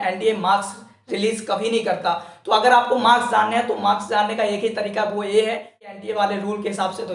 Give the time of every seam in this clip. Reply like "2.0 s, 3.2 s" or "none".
5.9 s